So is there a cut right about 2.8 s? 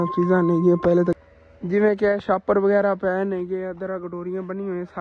no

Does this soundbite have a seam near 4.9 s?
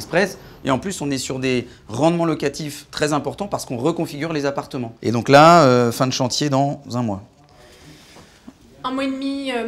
yes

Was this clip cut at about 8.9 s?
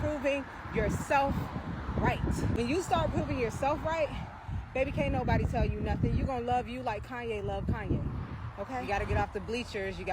yes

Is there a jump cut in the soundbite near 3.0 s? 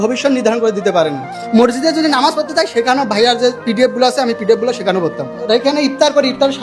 no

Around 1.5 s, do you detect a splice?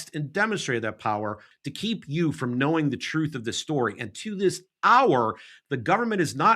yes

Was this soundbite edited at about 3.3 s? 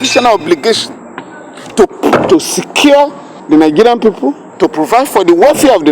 yes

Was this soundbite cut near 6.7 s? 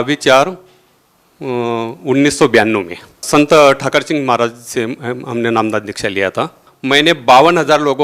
yes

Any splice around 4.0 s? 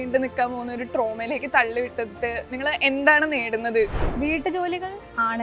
yes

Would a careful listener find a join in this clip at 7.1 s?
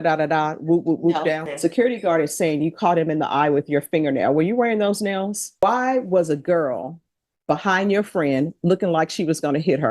no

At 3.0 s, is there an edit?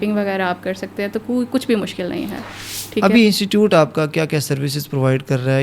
yes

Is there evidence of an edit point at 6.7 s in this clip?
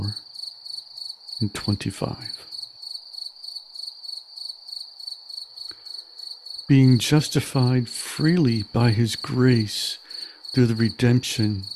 yes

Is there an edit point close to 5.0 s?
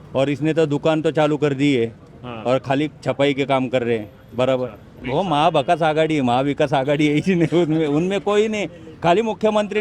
yes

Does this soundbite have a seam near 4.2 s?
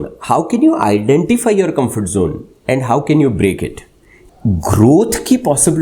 yes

